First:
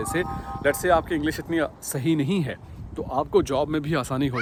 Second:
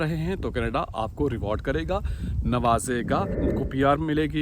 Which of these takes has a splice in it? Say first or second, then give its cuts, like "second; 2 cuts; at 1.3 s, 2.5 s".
second; 1 cut; at 3.4 s